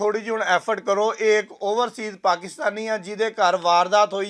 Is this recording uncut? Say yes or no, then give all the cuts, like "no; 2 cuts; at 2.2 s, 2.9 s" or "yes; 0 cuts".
yes; 0 cuts